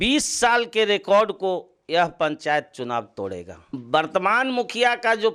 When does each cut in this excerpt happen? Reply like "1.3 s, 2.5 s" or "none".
3.7 s